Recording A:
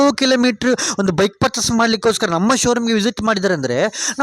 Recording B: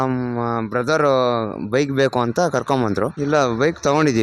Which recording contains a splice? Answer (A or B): B